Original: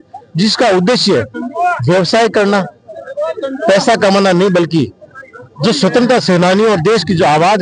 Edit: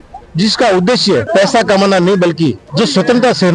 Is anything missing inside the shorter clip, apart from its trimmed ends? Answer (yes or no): yes